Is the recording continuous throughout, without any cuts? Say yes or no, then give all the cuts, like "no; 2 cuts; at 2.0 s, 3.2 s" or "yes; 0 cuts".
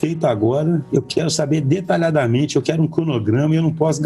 yes; 0 cuts